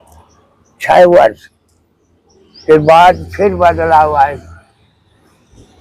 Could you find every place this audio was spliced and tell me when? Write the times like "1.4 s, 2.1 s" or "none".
none